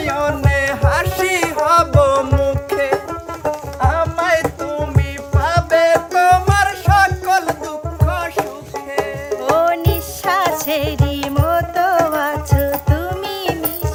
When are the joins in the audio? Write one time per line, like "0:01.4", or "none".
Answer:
none

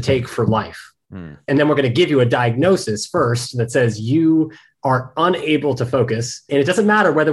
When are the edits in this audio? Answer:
0:01.5
0:06.5

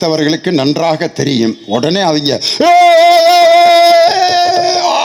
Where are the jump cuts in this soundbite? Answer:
none

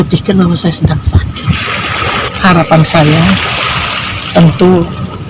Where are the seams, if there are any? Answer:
0:02.3

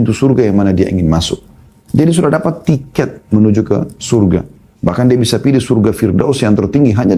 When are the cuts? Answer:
none

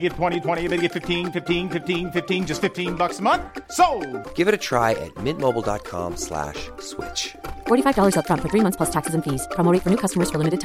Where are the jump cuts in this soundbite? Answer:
none

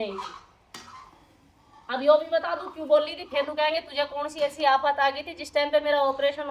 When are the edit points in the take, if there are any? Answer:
none

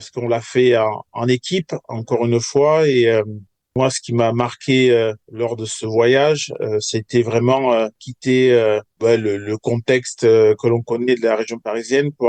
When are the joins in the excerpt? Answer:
0:08.0
0:08.9

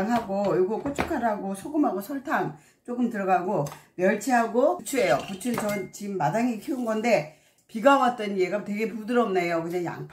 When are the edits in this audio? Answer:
none

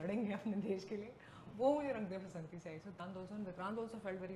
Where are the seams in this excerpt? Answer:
0:03.0

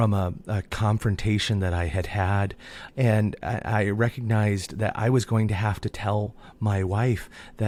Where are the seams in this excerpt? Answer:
none

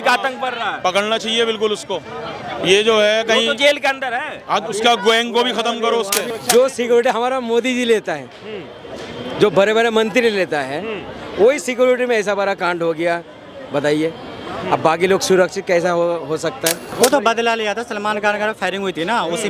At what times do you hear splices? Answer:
0:06.2
0:16.8

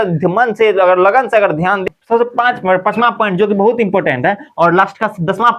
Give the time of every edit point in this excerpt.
0:01.8

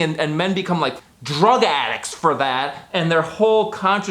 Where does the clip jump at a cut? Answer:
0:01.0

